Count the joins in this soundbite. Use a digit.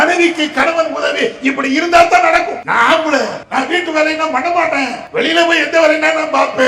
3